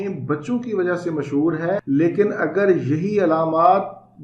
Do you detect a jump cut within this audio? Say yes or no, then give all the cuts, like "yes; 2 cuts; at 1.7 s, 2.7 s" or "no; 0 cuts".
yes; 1 cut; at 1.8 s